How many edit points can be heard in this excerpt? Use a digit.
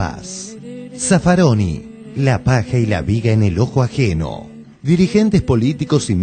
0